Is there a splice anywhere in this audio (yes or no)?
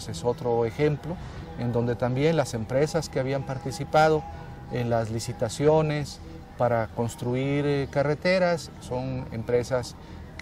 yes